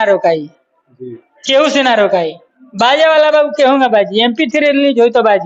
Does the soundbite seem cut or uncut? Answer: uncut